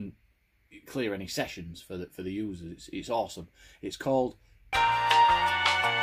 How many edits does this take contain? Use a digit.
1